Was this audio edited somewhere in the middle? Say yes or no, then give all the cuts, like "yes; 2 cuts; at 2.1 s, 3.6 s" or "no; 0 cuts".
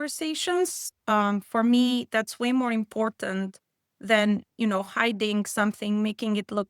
no; 0 cuts